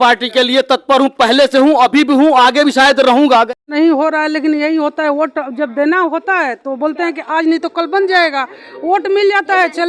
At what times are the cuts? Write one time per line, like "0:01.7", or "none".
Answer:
0:03.6